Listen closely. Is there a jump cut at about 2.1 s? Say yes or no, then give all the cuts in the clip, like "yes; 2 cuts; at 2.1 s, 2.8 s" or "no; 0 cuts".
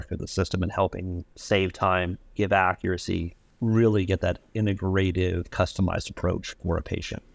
no; 0 cuts